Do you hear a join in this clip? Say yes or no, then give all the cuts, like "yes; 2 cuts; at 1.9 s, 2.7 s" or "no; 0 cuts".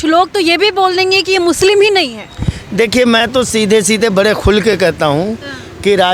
no; 0 cuts